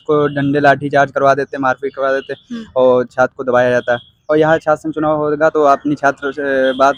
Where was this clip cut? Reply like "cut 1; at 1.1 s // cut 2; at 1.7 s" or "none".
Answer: none